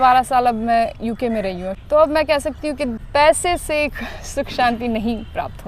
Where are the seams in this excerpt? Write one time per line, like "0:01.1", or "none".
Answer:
0:01.7
0:03.0